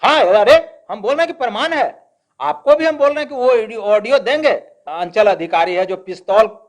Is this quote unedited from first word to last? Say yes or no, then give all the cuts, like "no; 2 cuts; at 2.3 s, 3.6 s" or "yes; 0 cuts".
no; 1 cut; at 4.8 s